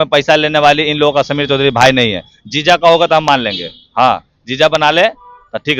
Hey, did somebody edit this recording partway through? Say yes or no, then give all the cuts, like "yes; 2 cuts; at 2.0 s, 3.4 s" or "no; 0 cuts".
no; 0 cuts